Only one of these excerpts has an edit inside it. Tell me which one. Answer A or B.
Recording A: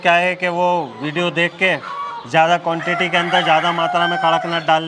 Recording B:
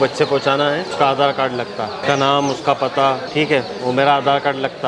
B